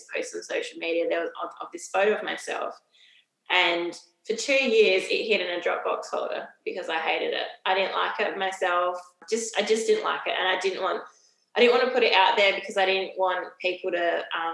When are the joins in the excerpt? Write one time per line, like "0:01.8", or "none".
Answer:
0:09.2